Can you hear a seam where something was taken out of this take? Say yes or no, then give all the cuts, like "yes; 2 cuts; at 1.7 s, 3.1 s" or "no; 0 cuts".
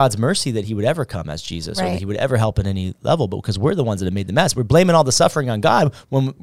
no; 0 cuts